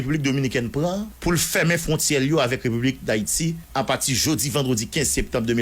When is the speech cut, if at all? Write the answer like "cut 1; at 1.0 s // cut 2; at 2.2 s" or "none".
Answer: cut 1; at 1.1 s // cut 2; at 3.6 s

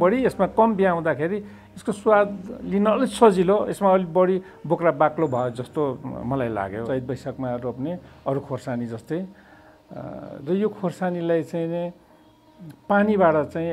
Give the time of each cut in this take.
cut 1; at 6.8 s

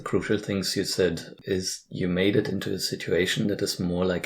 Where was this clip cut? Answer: cut 1; at 1.3 s

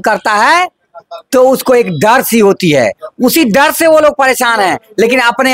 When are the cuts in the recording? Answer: none

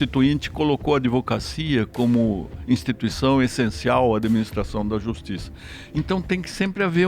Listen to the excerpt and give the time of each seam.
none

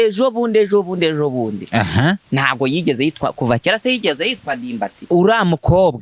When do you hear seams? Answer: cut 1; at 4.9 s

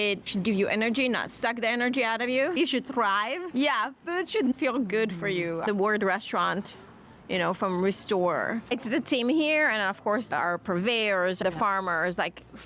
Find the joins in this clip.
cut 1; at 3.4 s // cut 2; at 4.5 s // cut 3; at 8.7 s // cut 4; at 10.3 s // cut 5; at 11.4 s

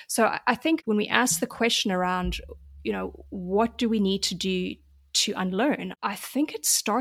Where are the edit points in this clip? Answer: cut 1; at 1.0 s // cut 2; at 5.9 s

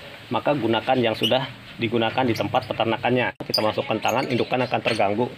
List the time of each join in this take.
cut 1; at 3.5 s

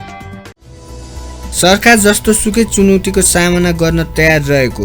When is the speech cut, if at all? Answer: cut 1; at 1.5 s

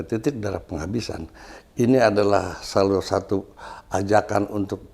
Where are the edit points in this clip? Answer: none

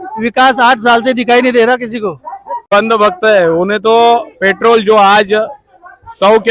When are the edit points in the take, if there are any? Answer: cut 1; at 2.7 s

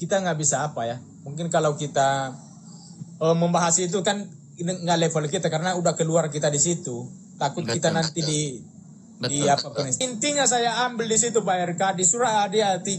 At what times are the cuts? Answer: cut 1; at 10.0 s

